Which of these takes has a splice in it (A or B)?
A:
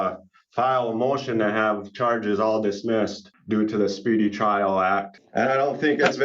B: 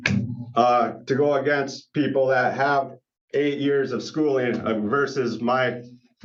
A